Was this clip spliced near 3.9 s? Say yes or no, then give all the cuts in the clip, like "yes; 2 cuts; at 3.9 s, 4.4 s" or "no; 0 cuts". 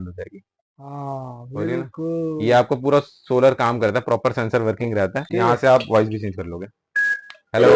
no; 1 cut; at 5.2 s